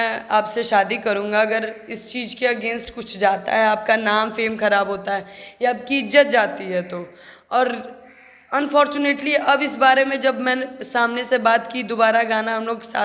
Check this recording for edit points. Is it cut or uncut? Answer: uncut